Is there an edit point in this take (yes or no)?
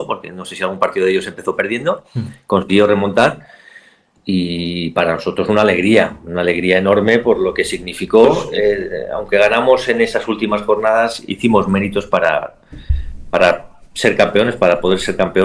yes